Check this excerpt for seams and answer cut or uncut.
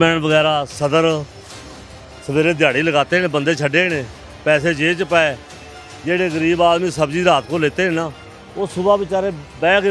uncut